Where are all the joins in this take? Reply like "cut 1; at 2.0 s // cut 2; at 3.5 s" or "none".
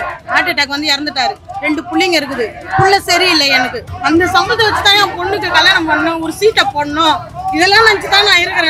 cut 1; at 3.8 s